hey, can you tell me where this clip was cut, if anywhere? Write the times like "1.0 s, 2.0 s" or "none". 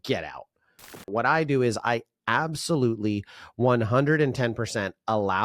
1.1 s